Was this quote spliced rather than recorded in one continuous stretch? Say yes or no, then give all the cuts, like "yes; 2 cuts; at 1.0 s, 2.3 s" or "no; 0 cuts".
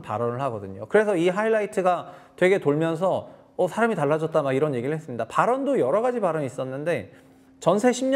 no; 0 cuts